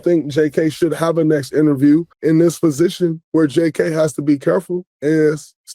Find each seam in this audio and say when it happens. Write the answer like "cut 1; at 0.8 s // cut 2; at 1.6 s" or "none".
cut 1; at 2.1 s // cut 2; at 3.2 s // cut 3; at 4.9 s